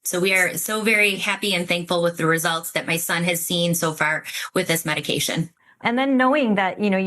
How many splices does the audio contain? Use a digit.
1